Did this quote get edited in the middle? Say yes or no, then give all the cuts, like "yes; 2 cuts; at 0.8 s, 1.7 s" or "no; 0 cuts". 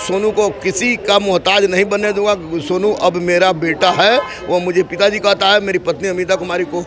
no; 0 cuts